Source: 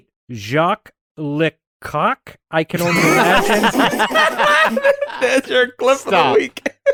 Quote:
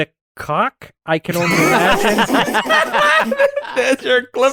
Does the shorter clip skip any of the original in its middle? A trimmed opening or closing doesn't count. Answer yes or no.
no